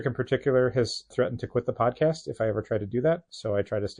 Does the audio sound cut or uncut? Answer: cut